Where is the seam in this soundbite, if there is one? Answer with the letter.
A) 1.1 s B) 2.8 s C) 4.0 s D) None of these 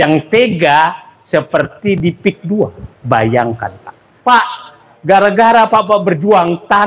C